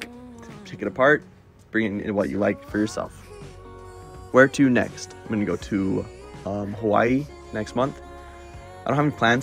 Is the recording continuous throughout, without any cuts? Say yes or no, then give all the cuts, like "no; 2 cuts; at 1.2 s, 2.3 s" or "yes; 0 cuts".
yes; 0 cuts